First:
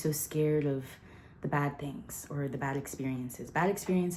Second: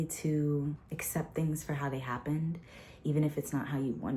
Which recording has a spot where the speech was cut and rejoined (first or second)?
second